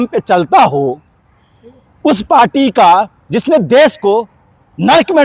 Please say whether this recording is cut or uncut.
uncut